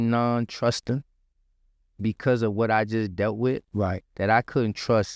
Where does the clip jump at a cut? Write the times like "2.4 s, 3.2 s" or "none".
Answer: none